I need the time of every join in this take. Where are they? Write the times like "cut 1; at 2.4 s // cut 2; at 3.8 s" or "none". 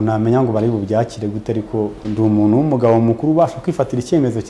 cut 1; at 2.0 s